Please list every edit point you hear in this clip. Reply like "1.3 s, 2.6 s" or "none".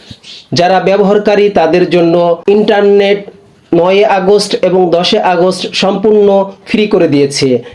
2.4 s